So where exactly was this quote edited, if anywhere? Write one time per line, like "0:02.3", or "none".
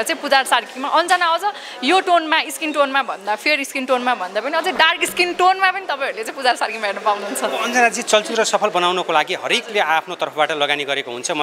none